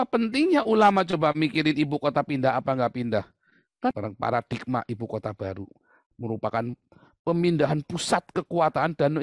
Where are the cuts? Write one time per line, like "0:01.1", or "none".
0:03.9